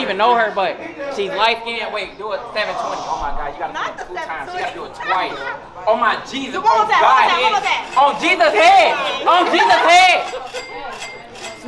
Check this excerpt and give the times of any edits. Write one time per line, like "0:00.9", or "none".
none